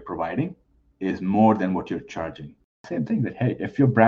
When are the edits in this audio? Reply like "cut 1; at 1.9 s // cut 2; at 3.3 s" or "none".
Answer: cut 1; at 2.8 s